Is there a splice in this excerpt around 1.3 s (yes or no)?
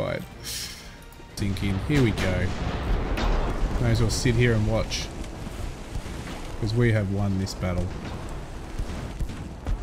yes